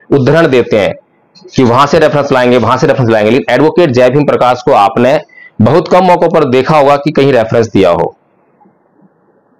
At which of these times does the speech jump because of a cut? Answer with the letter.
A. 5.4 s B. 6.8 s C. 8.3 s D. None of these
D